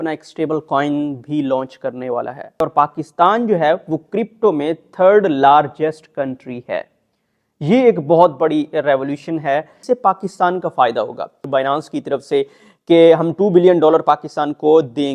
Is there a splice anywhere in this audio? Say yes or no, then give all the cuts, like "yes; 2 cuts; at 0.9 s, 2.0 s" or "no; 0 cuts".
yes; 3 cuts; at 2.6 s, 9.7 s, 11.4 s